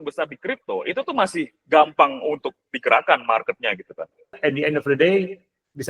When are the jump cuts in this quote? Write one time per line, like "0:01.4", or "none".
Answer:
0:04.4